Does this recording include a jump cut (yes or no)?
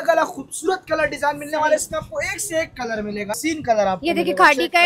yes